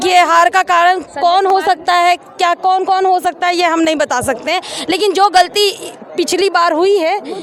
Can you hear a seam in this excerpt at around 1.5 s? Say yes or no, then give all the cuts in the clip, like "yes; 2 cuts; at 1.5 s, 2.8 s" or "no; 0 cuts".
no; 0 cuts